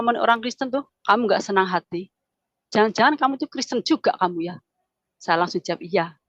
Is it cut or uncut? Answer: uncut